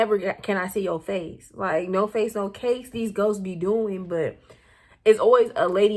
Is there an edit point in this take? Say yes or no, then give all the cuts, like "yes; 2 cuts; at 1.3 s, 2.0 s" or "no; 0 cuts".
no; 0 cuts